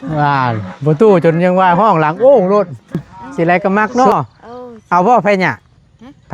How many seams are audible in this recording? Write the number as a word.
one